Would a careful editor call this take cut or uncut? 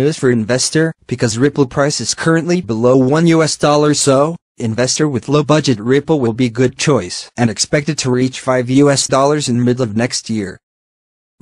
uncut